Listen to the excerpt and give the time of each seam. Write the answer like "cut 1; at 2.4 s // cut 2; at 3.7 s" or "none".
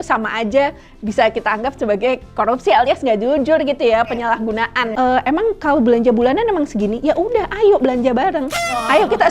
cut 1; at 4.9 s